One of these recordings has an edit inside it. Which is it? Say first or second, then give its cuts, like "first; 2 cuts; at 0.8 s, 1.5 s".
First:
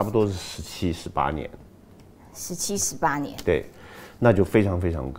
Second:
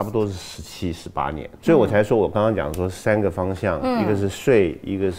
second; 1 cut; at 1.5 s